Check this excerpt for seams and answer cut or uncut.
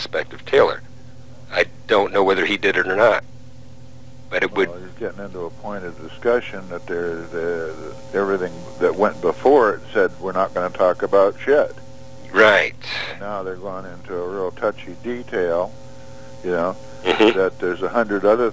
cut